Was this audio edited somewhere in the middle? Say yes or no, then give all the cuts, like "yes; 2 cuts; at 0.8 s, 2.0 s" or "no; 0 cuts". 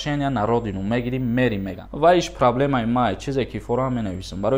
yes; 1 cut; at 1.8 s